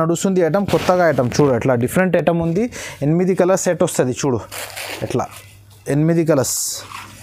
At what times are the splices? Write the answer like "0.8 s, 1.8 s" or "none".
none